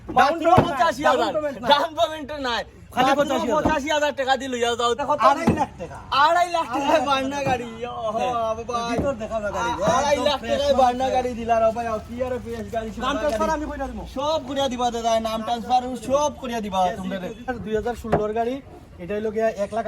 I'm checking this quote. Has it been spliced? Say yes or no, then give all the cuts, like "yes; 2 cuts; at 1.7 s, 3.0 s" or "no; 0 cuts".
yes; 2 cuts; at 5.0 s, 17.6 s